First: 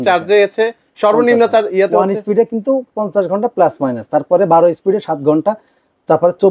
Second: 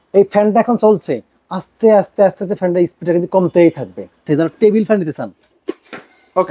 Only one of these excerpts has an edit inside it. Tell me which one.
second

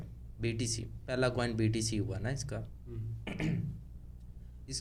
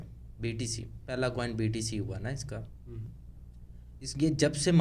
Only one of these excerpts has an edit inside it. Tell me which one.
second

